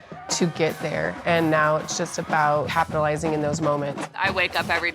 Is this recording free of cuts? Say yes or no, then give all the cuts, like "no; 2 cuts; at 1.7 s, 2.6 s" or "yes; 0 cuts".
no; 2 cuts; at 2.7 s, 4.1 s